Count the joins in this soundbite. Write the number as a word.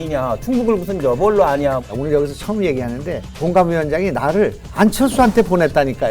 three